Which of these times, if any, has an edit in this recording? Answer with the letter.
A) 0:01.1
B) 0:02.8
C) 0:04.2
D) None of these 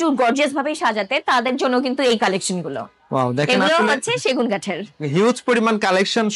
D